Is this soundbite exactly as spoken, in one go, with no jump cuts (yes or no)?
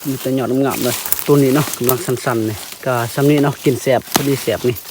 no